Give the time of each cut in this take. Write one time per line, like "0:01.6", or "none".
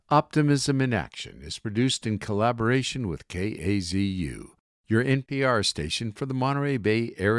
none